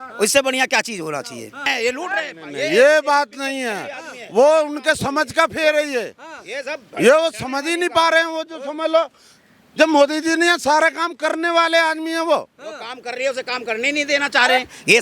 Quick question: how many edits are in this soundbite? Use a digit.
1